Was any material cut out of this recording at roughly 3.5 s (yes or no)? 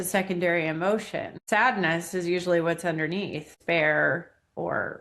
yes